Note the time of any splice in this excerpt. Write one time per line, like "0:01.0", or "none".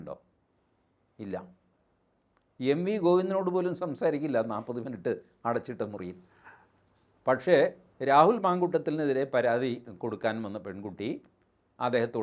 none